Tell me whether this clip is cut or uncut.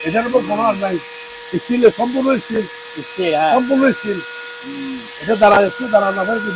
uncut